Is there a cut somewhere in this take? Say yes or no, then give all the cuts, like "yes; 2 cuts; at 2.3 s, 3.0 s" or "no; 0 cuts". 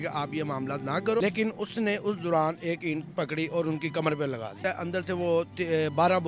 yes; 2 cuts; at 1.2 s, 4.6 s